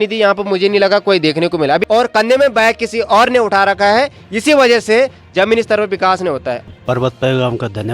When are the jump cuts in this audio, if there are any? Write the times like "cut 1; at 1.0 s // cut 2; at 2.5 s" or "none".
cut 1; at 1.8 s // cut 2; at 6.6 s